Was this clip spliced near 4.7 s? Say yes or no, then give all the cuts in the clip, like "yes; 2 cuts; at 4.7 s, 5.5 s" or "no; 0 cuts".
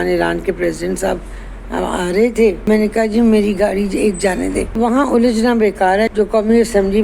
yes; 3 cuts; at 2.7 s, 4.7 s, 6.1 s